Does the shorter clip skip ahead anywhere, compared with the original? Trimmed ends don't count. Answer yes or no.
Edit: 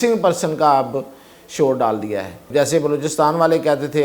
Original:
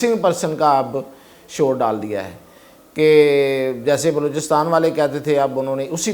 yes